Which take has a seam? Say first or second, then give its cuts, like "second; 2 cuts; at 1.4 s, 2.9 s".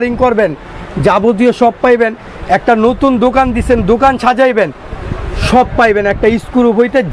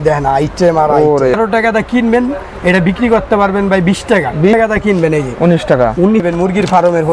second; 3 cuts; at 1.4 s, 4.5 s, 6.3 s